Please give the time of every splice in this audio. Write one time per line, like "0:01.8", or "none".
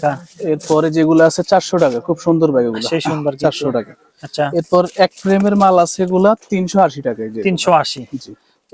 none